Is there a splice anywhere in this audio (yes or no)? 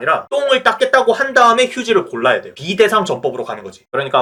no